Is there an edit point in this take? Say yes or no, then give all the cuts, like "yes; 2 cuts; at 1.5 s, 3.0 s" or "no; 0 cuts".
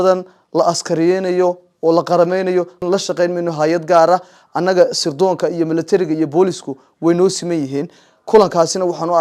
yes; 1 cut; at 2.8 s